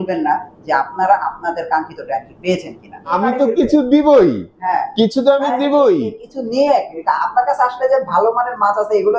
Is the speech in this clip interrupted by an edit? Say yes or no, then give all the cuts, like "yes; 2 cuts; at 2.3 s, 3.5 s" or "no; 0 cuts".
yes; 1 cut; at 3.1 s